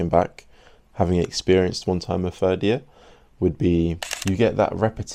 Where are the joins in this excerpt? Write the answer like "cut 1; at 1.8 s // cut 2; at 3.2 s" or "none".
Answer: cut 1; at 4.1 s